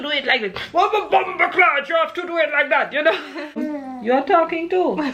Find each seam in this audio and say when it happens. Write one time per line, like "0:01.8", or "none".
0:03.6